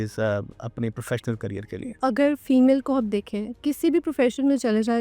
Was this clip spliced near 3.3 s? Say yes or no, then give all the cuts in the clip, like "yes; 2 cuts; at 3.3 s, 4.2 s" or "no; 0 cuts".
no; 1 cut; at 1.9 s